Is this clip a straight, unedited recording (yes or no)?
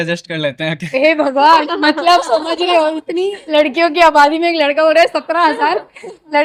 yes